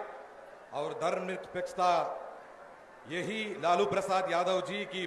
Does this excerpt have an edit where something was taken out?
no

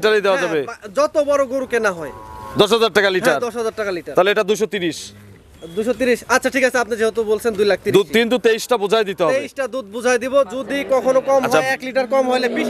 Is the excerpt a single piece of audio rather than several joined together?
yes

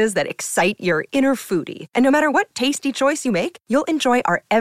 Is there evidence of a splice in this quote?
no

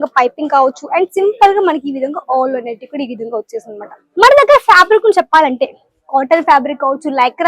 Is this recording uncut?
no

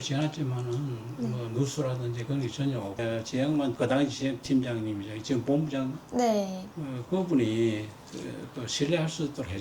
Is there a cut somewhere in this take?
yes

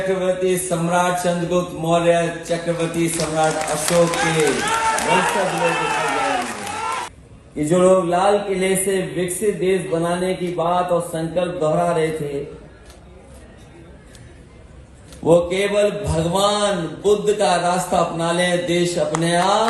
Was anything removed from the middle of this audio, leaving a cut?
yes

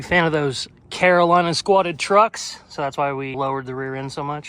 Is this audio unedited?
no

